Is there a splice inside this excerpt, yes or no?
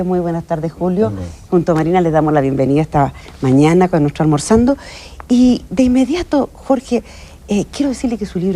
yes